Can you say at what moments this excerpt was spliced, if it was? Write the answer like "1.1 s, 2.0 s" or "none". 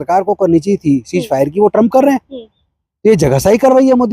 none